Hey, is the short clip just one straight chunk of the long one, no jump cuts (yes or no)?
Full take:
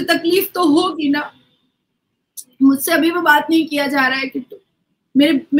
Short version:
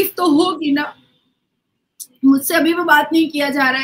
yes